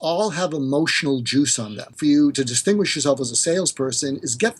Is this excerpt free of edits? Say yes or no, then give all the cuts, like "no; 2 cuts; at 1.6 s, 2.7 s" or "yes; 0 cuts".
no; 1 cut; at 1.9 s